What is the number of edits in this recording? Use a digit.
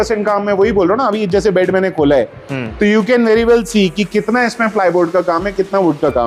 0